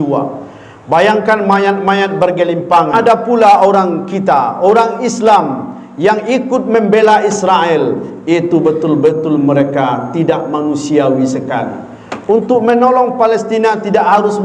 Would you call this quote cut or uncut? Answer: cut